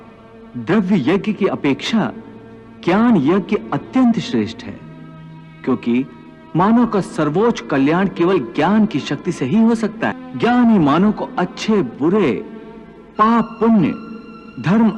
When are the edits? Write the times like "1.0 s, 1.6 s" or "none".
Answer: 10.2 s

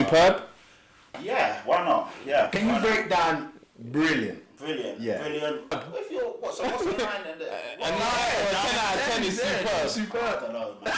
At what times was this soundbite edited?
5.7 s

